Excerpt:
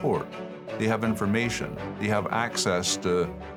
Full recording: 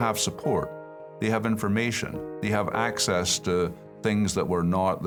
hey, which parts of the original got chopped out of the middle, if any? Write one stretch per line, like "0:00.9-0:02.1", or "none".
none